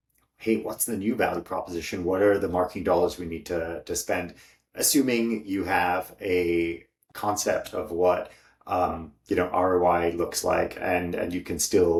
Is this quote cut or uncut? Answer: uncut